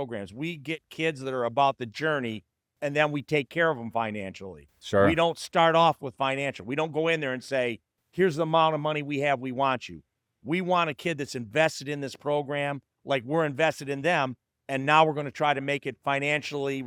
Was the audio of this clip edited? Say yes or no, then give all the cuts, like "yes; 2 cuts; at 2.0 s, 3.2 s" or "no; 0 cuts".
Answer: no; 0 cuts